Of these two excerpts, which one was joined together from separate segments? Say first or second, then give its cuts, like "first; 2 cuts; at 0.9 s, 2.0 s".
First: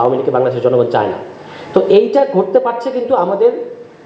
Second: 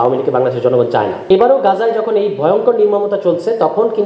second; 1 cut; at 1.2 s